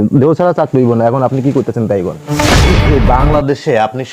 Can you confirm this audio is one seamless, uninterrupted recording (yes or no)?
no